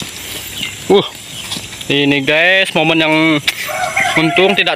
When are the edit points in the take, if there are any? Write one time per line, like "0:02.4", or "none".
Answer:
none